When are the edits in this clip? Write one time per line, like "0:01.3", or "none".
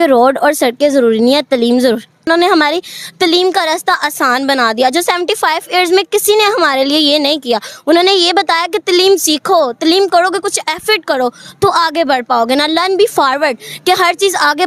0:02.3